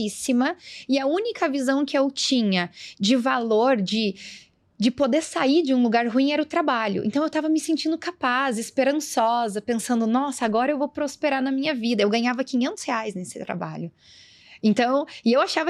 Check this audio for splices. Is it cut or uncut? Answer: uncut